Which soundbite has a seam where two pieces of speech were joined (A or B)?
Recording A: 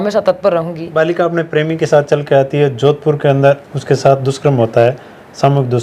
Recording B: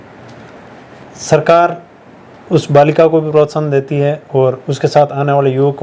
A